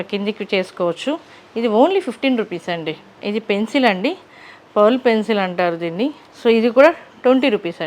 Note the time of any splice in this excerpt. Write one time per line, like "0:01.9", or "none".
none